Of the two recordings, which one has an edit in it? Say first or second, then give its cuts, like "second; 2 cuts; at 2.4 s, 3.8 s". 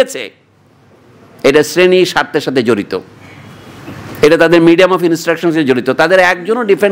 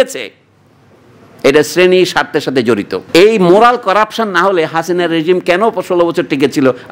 second; 1 cut; at 3.0 s